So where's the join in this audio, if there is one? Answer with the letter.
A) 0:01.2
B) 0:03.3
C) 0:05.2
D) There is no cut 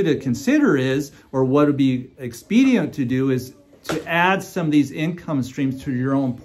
D